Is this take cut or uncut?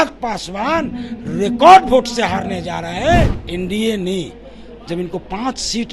cut